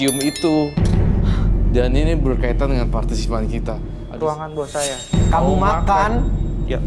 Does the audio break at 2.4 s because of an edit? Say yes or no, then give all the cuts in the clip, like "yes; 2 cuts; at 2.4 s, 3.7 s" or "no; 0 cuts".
no; 1 cut; at 4.0 s